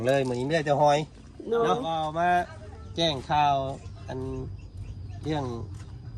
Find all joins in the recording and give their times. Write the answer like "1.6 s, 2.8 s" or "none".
2.1 s